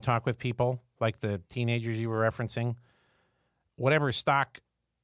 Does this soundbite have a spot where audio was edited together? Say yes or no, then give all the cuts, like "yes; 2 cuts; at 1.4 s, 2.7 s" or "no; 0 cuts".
no; 0 cuts